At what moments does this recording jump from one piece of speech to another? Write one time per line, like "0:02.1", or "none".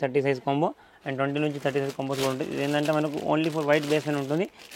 none